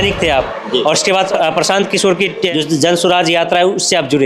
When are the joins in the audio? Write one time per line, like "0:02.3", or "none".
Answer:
0:01.3
0:02.5